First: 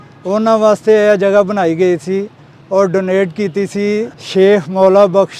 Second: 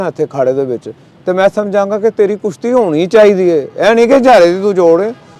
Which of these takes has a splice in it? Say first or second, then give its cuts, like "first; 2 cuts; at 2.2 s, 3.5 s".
first; 1 cut; at 4.2 s